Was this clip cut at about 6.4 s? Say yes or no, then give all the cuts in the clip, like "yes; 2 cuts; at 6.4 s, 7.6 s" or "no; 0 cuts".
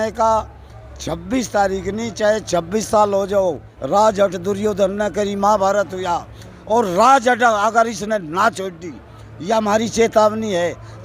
no; 1 cut; at 3.7 s